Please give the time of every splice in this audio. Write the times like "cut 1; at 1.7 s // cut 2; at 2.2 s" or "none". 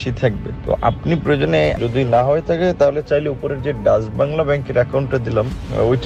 none